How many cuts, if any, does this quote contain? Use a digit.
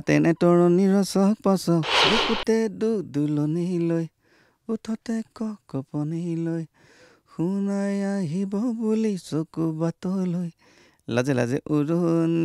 1